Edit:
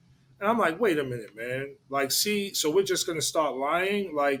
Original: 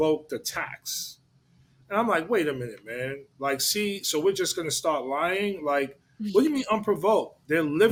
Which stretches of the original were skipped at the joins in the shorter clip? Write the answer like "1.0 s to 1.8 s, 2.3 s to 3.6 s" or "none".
none